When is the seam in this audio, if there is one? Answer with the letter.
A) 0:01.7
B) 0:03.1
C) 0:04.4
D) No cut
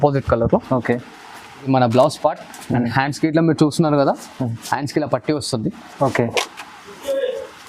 A